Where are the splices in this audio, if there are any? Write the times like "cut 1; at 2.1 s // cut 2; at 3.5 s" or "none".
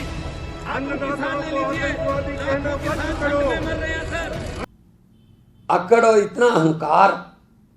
cut 1; at 4.6 s